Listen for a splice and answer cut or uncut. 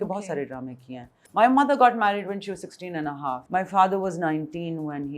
cut